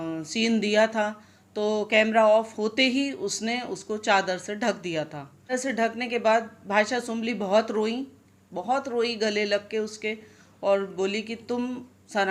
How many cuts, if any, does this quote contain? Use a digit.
1